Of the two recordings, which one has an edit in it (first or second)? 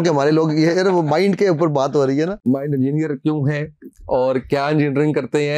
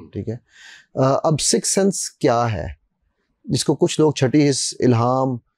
first